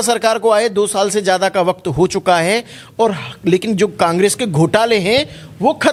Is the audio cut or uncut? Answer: uncut